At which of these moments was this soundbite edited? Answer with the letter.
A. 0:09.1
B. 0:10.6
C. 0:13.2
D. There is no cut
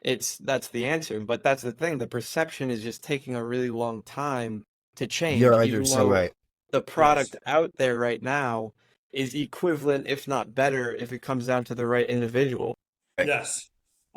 C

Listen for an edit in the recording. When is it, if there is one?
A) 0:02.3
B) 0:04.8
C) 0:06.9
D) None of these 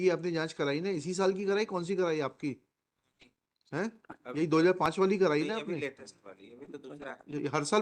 D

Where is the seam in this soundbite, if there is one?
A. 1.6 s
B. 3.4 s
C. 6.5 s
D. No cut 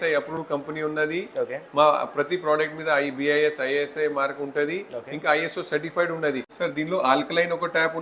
C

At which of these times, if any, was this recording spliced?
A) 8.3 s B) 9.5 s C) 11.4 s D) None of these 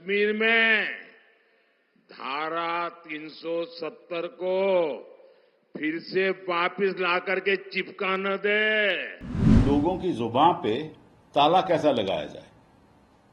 B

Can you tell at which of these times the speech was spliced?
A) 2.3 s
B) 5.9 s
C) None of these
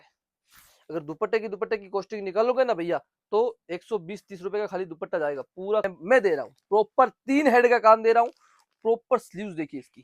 B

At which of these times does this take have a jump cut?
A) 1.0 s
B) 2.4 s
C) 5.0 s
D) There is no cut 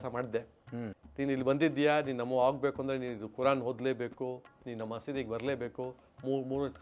A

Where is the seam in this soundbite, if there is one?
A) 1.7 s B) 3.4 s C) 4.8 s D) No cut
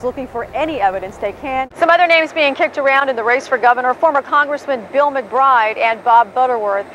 A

